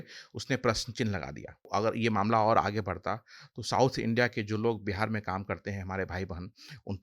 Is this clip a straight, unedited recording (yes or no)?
no